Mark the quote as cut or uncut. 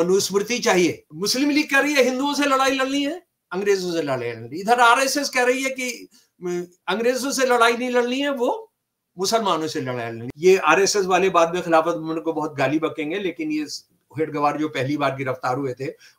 cut